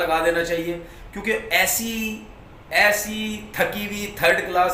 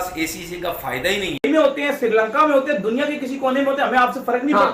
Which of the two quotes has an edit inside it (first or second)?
second